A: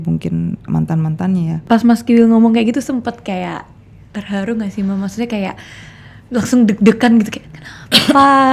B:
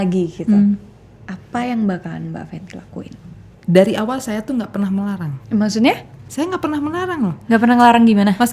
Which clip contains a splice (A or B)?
A